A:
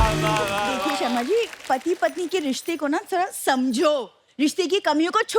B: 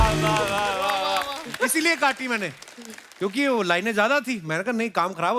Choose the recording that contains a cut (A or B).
A